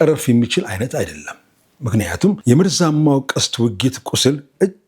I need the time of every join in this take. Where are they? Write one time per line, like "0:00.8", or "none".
0:02.4